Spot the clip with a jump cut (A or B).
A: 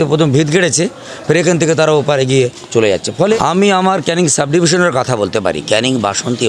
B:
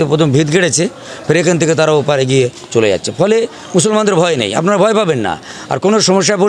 A